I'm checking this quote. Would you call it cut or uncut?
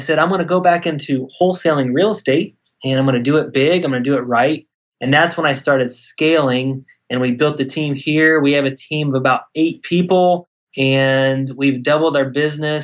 uncut